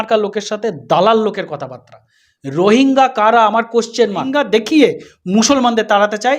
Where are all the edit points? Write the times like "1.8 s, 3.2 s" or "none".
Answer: 4.4 s